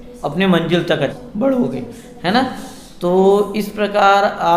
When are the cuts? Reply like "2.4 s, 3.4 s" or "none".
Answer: 1.2 s